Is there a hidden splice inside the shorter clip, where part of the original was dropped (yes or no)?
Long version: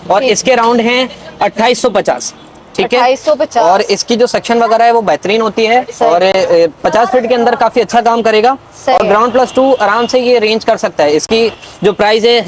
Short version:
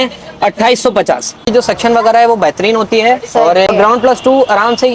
yes